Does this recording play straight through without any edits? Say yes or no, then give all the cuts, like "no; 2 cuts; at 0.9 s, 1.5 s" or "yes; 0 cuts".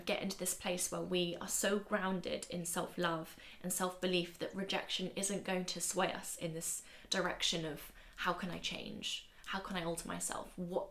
yes; 0 cuts